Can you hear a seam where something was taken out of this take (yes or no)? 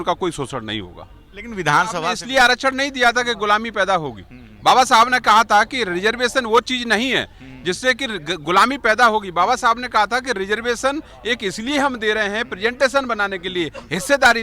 yes